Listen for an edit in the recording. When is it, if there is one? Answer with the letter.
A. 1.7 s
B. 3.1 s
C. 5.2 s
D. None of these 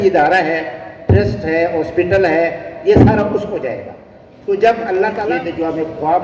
C